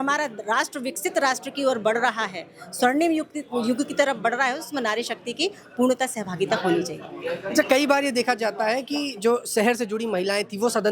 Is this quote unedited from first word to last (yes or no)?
yes